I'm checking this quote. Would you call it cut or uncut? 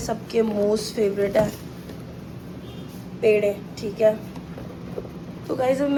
uncut